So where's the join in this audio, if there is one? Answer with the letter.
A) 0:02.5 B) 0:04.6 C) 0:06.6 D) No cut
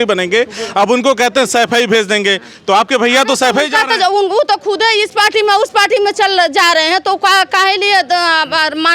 D